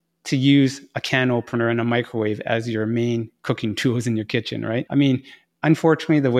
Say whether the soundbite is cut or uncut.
uncut